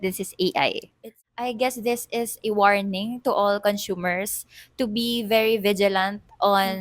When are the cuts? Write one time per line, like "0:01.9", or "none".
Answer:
0:01.2